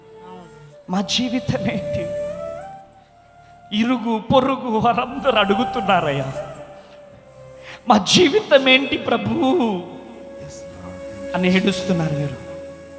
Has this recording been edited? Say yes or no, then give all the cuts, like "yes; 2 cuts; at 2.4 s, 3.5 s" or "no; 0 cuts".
no; 0 cuts